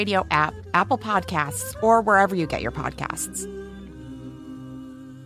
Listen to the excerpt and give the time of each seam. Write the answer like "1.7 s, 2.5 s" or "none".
3.1 s

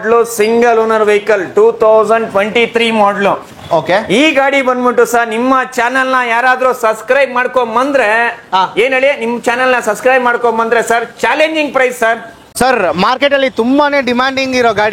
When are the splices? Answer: 12.6 s

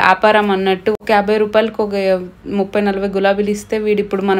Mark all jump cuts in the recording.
1.0 s

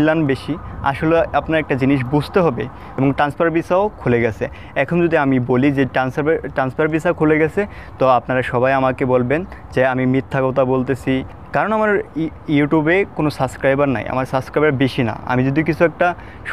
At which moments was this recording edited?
2.8 s, 11.3 s

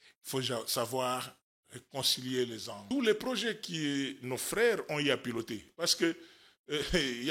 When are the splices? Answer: 2.9 s

